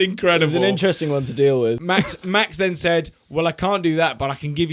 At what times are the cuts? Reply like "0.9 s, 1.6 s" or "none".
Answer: 1.8 s